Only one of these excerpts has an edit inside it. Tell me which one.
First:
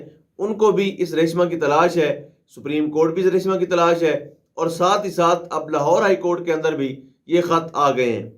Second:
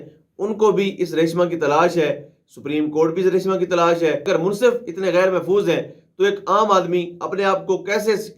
second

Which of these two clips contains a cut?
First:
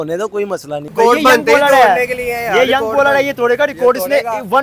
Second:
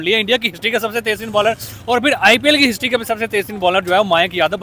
first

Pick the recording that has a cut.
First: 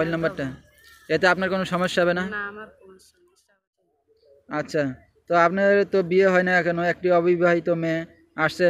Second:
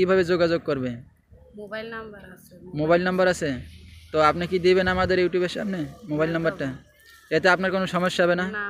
first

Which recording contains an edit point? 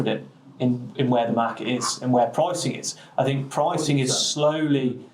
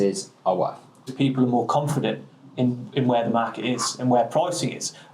second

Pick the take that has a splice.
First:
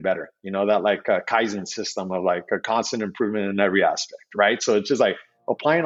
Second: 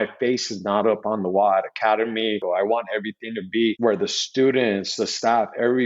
second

